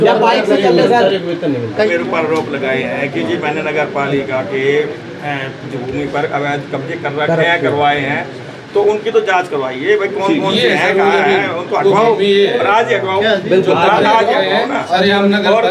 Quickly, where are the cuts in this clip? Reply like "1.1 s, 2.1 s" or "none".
1.9 s